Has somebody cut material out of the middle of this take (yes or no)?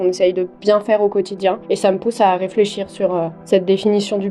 yes